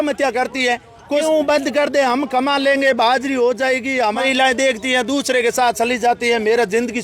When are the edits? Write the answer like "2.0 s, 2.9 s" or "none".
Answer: 1.2 s, 4.0 s